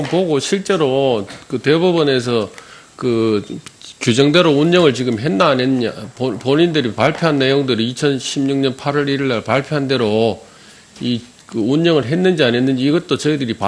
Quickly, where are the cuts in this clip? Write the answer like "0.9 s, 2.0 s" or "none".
4.7 s